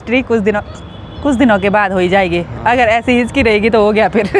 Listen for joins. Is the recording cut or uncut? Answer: uncut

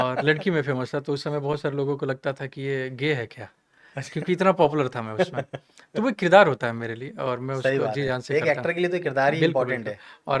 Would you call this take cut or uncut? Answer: uncut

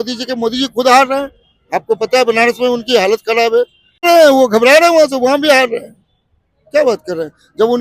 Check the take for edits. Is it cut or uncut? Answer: cut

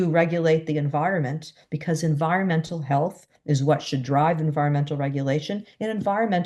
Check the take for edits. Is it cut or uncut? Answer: uncut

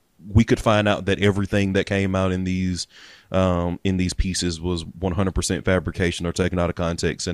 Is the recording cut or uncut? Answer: uncut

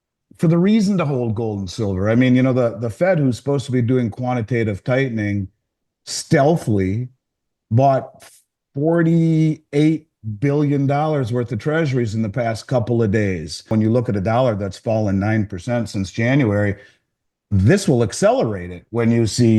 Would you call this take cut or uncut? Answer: cut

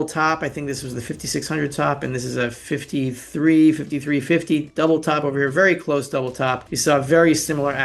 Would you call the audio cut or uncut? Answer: cut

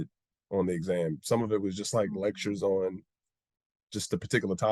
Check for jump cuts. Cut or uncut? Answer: uncut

